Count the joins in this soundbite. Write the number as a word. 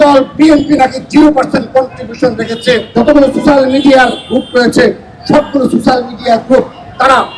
one